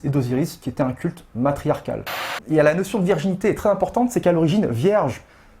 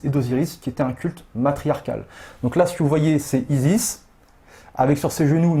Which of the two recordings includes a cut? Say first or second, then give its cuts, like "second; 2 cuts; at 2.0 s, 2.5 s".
first; 1 cut; at 2.3 s